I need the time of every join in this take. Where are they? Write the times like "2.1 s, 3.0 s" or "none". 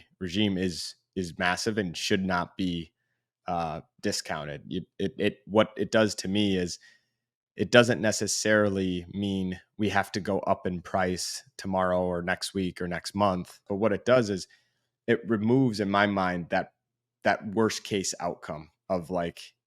13.7 s